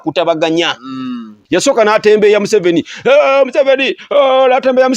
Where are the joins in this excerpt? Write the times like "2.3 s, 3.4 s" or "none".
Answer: 1.3 s